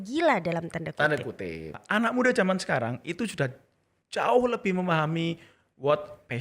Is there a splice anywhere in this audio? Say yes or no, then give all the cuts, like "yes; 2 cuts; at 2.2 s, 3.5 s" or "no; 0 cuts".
yes; 1 cut; at 1.8 s